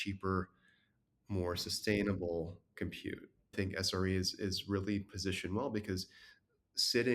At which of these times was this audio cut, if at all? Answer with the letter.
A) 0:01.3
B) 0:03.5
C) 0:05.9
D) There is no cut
B